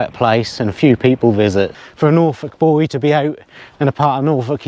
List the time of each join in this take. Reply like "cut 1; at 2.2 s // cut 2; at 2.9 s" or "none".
cut 1; at 1.8 s

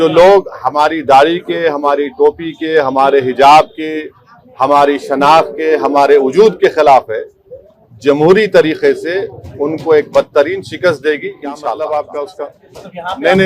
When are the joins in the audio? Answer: cut 1; at 11.7 s

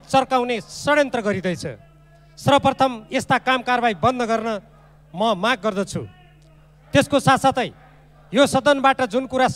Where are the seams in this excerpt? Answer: none

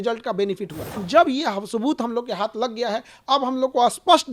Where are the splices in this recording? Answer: cut 1; at 1.0 s

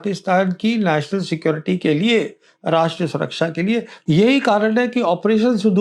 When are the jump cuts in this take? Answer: cut 1; at 3.9 s

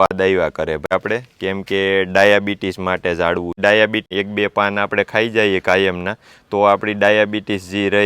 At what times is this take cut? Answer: cut 1; at 0.9 s // cut 2; at 4.1 s

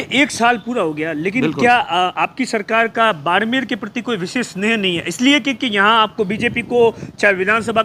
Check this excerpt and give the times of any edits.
none

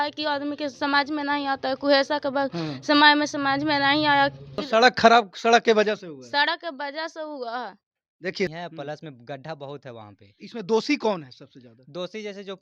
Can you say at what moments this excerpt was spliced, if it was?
cut 1; at 4.6 s // cut 2; at 8.5 s

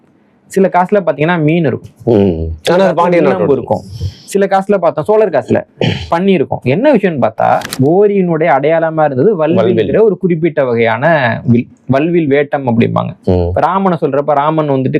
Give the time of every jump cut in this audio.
cut 1; at 7.7 s

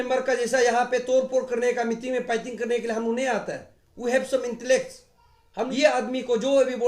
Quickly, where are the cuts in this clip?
cut 1; at 5.7 s

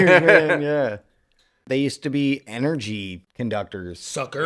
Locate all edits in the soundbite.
cut 1; at 1.6 s // cut 2; at 3.2 s

